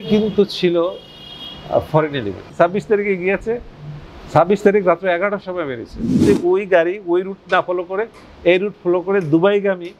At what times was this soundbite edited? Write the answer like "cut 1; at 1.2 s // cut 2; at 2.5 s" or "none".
cut 1; at 2.5 s // cut 2; at 6.2 s

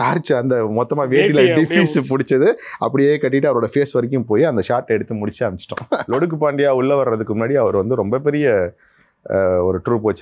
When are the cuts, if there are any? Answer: cut 1; at 6.0 s

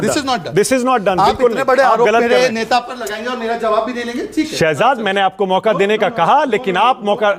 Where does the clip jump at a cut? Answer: none

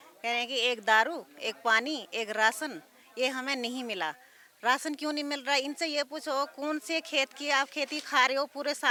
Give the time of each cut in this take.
none

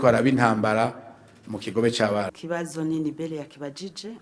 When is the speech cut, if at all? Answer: cut 1; at 2.3 s

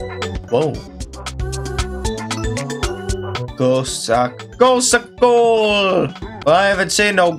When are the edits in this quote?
cut 1; at 6.2 s

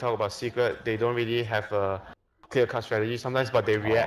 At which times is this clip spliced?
none

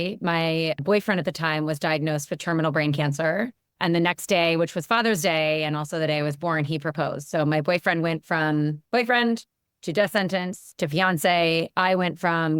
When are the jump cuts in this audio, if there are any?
cut 1; at 3.6 s // cut 2; at 8.8 s

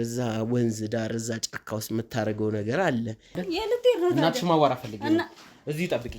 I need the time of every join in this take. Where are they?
cut 1; at 3.4 s

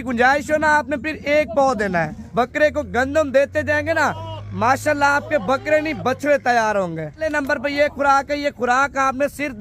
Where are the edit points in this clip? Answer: cut 1; at 2.2 s // cut 2; at 7.3 s

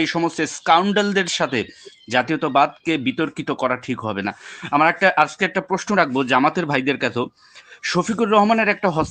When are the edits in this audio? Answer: none

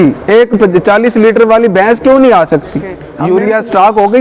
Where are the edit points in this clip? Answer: cut 1; at 3.1 s

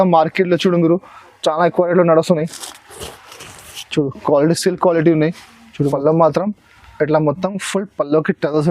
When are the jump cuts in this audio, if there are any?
cut 1; at 5.8 s

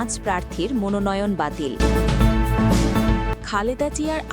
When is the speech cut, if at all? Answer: cut 1; at 1.7 s // cut 2; at 3.4 s

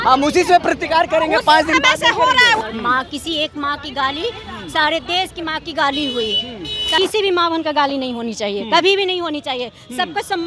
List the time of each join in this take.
cut 1; at 2.7 s // cut 2; at 7.0 s

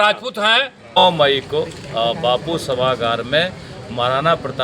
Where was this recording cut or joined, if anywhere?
cut 1; at 1.0 s

